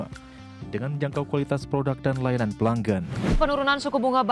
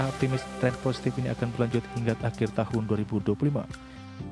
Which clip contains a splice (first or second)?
first